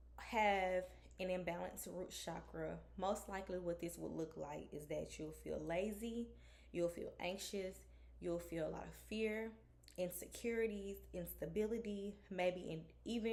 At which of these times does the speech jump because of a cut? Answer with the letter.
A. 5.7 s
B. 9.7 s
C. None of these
C